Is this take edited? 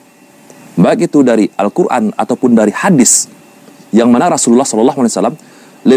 no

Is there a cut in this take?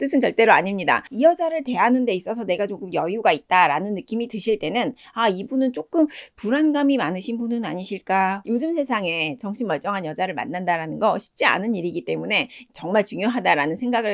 yes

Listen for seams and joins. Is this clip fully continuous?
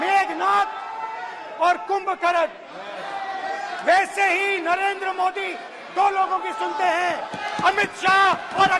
yes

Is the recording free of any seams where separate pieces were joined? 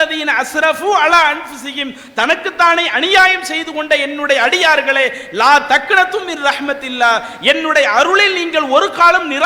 yes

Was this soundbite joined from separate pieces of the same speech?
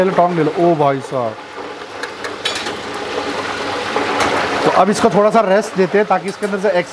no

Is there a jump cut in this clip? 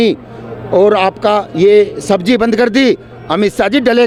no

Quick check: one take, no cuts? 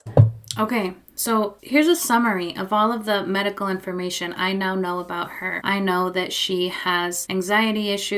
no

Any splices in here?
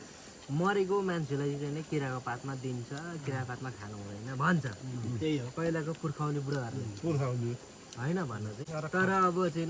yes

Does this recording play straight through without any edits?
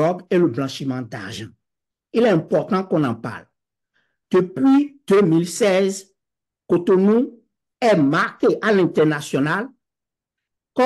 yes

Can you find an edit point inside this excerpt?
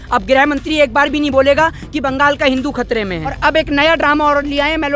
yes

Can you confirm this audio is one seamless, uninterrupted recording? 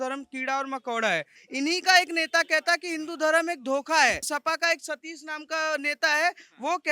no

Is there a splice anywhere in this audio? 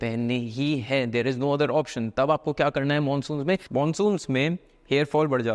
yes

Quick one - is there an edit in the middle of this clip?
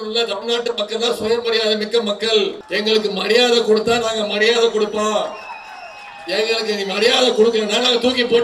yes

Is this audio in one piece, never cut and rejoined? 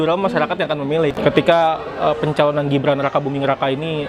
no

